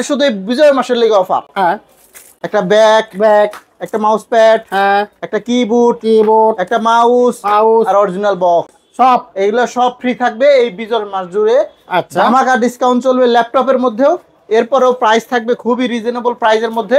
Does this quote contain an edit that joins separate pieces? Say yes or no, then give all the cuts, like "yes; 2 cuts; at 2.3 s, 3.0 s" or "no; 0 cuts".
no; 0 cuts